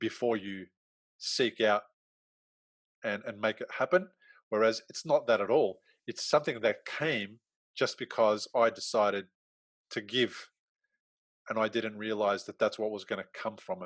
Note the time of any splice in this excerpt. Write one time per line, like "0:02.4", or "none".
none